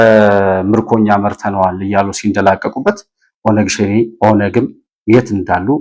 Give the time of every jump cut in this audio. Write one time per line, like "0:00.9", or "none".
none